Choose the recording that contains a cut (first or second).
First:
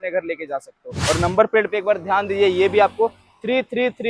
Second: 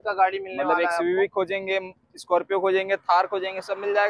first